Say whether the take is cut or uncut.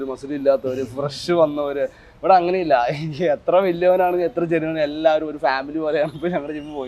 uncut